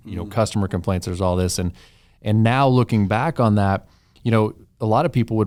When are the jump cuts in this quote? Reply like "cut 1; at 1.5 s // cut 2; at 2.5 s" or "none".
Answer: none